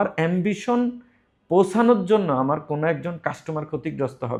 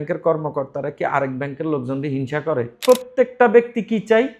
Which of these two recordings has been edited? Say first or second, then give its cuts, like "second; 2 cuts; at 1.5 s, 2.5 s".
second; 1 cut; at 2.8 s